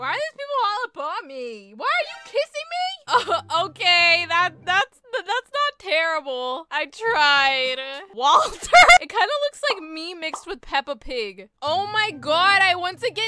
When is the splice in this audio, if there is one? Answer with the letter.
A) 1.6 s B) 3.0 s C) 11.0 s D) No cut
B